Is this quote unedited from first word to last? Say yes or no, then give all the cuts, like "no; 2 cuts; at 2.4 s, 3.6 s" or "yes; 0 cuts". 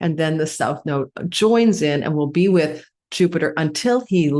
yes; 0 cuts